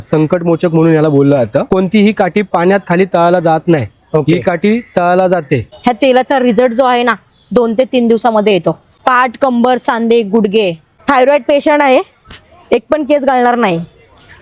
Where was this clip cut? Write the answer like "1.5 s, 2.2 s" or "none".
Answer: 1.7 s, 5.7 s, 8.9 s, 10.8 s